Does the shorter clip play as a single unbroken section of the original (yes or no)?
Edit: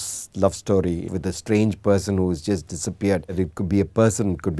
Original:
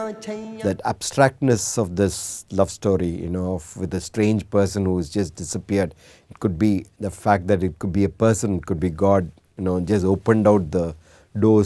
no